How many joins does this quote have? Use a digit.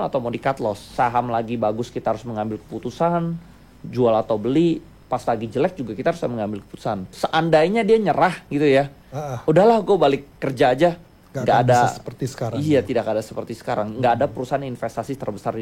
2